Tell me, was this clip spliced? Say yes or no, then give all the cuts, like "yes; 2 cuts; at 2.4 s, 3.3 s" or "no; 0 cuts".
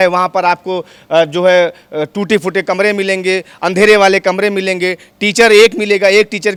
no; 0 cuts